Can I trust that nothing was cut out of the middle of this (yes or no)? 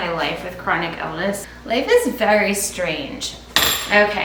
yes